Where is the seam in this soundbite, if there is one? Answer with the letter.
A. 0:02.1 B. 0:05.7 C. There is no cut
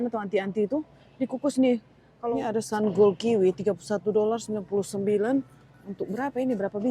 A